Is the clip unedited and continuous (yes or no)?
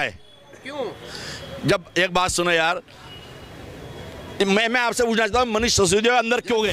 yes